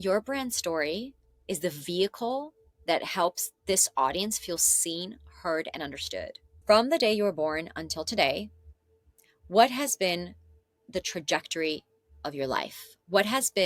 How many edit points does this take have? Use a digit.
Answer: 1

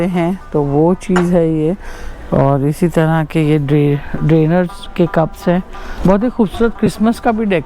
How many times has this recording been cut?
1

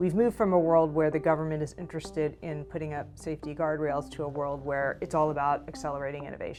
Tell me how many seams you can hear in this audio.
0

